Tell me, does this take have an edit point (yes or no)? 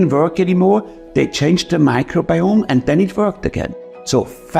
yes